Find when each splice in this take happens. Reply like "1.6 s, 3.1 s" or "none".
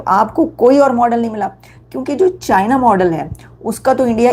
none